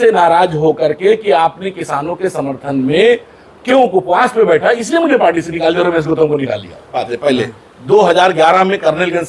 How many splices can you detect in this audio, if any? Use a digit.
1